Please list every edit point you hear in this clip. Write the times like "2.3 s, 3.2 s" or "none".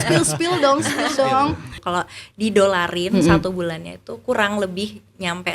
1.7 s